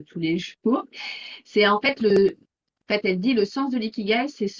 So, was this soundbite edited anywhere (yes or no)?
no